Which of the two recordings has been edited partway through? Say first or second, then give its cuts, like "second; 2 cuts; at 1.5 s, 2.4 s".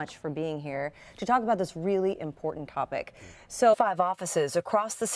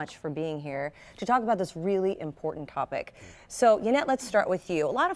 second; 1 cut; at 3.8 s